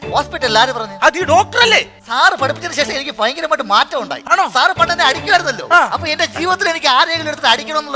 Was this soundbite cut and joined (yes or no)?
yes